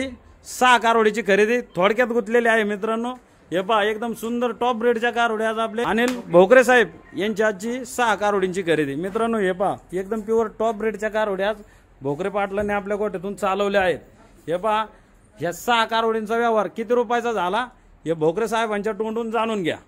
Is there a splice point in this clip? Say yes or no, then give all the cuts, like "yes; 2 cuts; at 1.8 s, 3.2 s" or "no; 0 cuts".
yes; 1 cut; at 5.9 s